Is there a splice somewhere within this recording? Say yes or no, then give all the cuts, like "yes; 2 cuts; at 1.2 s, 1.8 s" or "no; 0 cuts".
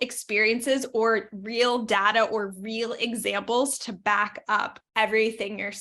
yes; 1 cut; at 4.8 s